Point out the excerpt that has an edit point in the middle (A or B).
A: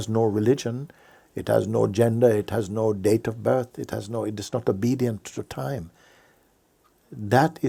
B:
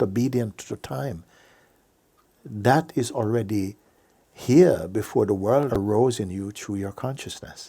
B